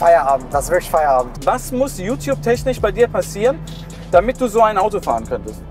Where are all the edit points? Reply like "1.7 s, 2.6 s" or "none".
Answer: 1.3 s